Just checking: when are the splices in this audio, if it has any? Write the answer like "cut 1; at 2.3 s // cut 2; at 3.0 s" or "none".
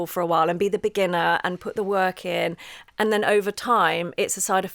cut 1; at 2.8 s